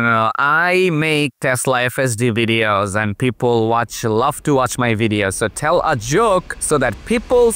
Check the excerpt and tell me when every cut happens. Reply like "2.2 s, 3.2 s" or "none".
6.6 s

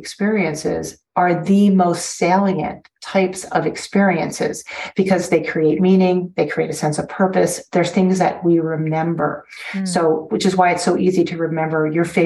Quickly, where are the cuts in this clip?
none

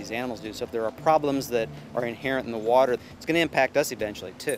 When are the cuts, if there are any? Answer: 3.0 s

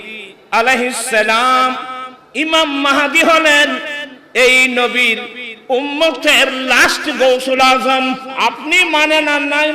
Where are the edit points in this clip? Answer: 8.3 s

